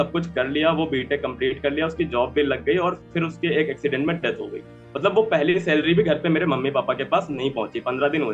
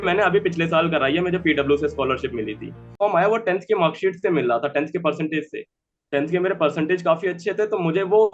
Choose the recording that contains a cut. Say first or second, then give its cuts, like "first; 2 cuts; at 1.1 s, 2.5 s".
second; 1 cut; at 3.0 s